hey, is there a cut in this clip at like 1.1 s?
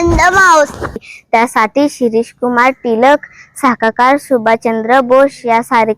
yes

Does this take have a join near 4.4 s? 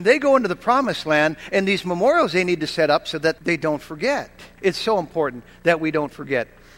yes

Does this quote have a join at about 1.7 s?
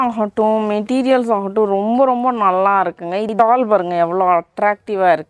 no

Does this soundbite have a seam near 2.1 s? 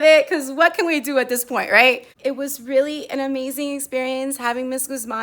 yes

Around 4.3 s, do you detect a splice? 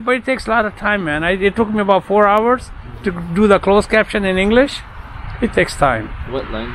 no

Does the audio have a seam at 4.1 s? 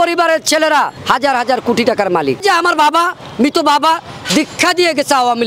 no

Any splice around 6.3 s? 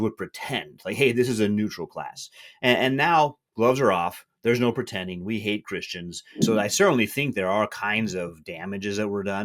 yes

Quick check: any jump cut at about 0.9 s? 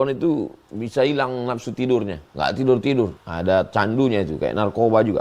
no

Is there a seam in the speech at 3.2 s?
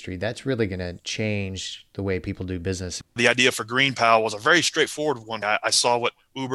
yes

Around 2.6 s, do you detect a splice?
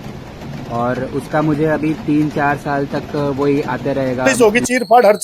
no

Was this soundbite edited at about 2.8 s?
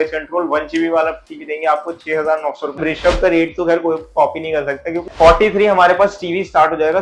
yes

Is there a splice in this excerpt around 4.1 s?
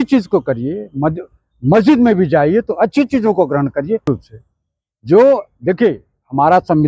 yes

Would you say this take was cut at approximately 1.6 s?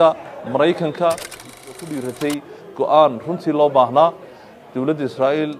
yes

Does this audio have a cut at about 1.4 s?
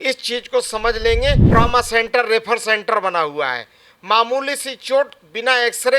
yes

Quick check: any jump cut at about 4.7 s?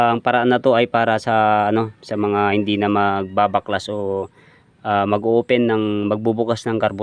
no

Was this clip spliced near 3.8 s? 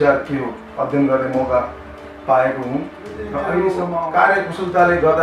yes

